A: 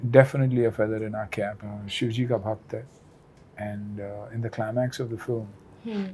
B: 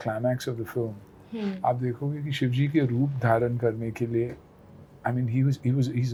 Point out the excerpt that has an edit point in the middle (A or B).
A